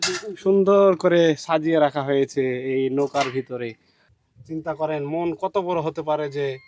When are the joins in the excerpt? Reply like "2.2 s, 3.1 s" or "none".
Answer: 3.8 s